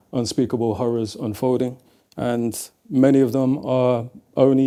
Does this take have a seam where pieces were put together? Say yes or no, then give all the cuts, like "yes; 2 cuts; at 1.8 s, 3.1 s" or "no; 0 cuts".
no; 0 cuts